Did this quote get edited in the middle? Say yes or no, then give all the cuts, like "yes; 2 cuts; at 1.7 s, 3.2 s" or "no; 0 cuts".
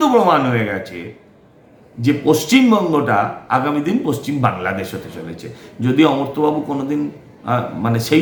no; 0 cuts